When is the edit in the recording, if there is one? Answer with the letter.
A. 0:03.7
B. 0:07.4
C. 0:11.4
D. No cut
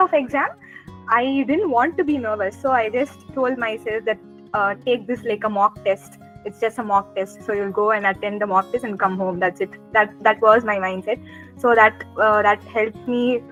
D